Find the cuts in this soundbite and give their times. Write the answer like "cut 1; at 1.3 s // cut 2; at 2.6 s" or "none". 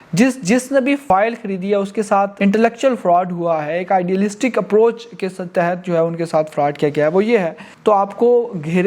cut 1; at 1.0 s // cut 2; at 2.3 s // cut 3; at 7.6 s

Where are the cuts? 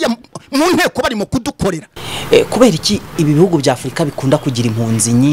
cut 1; at 1.9 s

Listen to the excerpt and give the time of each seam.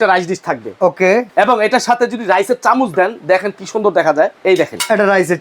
cut 1; at 1.3 s // cut 2; at 4.4 s

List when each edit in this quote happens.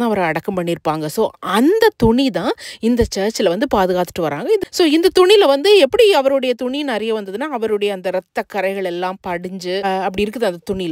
cut 1; at 4.6 s // cut 2; at 9.8 s

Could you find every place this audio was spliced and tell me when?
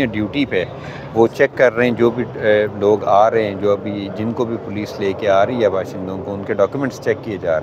none

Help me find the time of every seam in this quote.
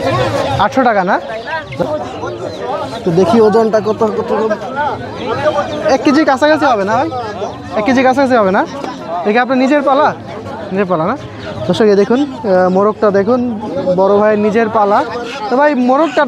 cut 1; at 1.9 s

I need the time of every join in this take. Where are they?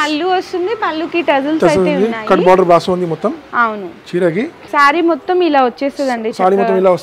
cut 1; at 4.6 s

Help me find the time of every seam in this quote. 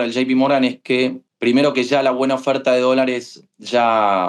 cut 1; at 1.3 s

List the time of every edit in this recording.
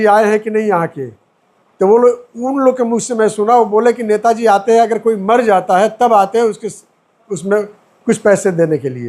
none

